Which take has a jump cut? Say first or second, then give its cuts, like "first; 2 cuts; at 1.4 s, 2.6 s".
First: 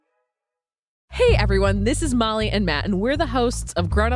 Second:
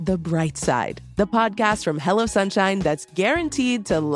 first; 1 cut; at 1.0 s